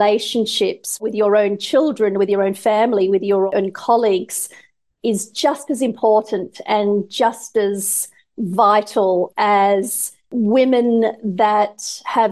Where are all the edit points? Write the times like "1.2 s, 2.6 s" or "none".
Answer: 3.5 s, 10.3 s